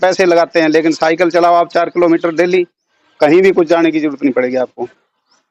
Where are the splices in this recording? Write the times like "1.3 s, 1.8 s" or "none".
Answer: none